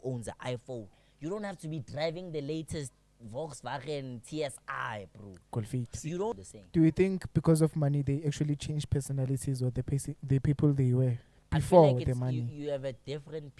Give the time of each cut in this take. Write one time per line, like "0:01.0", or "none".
0:06.3